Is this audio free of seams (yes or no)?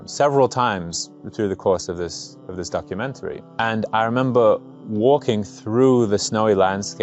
yes